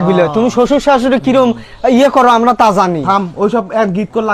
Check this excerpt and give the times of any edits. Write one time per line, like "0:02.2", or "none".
none